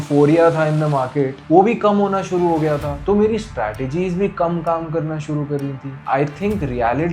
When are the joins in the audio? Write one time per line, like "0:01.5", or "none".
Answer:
0:01.4
0:05.9